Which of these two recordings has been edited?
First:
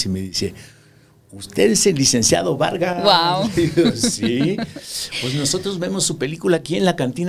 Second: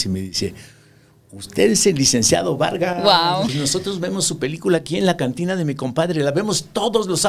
second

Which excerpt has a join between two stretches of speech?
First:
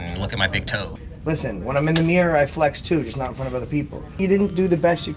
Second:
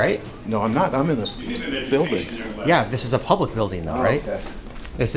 first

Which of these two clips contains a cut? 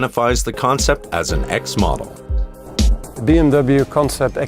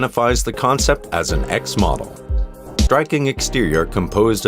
first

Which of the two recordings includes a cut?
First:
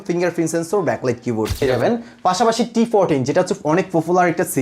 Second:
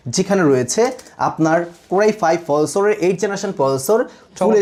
first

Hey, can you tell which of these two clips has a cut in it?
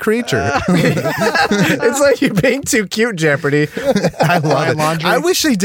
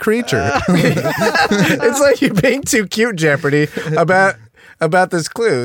first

